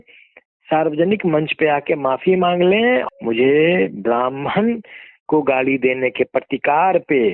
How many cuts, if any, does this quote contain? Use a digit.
1